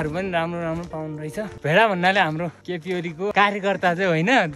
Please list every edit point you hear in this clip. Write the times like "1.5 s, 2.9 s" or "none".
1.5 s, 3.1 s